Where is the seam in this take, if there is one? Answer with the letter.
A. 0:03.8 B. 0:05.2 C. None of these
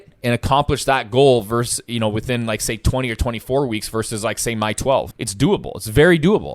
B